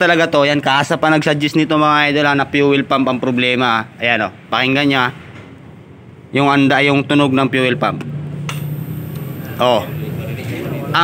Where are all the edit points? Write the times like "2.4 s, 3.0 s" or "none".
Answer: none